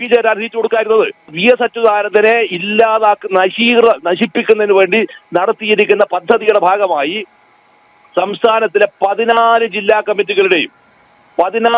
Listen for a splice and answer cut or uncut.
cut